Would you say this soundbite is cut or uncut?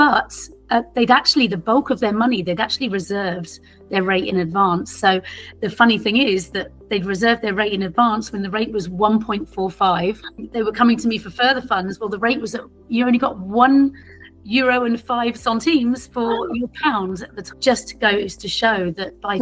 cut